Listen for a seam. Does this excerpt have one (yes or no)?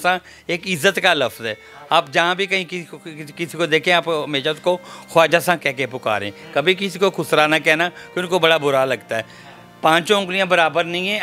no